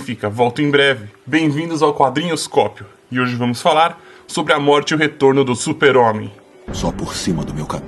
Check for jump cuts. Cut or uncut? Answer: uncut